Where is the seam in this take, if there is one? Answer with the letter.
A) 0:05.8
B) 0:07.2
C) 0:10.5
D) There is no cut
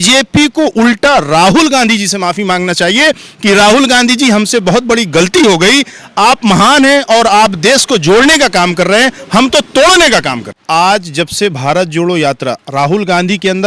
C